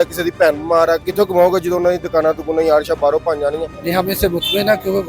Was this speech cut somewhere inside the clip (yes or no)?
yes